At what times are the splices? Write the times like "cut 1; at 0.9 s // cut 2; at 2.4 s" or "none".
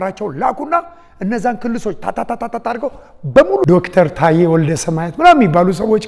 cut 1; at 3.7 s